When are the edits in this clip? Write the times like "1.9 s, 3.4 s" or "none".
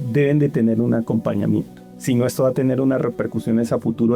none